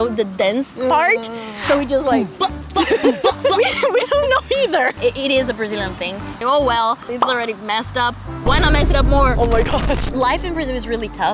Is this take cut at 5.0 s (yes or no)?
yes